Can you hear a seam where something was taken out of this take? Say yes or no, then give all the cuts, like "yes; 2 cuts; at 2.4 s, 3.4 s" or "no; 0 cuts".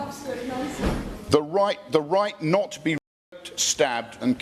no; 0 cuts